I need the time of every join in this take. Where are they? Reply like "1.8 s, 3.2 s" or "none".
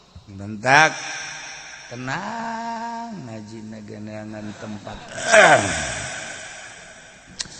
5.0 s